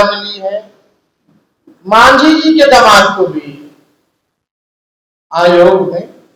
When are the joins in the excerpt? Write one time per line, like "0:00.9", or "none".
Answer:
none